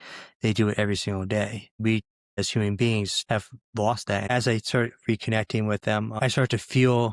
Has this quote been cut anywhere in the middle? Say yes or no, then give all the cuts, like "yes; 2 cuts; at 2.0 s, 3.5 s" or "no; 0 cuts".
yes; 4 cuts; at 1.9 s, 3.2 s, 4.3 s, 6.2 s